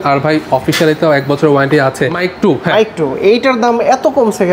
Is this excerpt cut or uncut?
cut